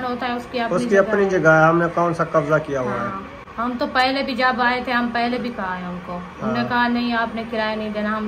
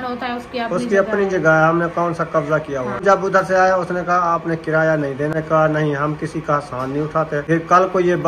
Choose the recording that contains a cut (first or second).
second